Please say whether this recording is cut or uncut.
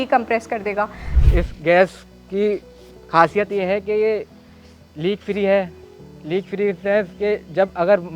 cut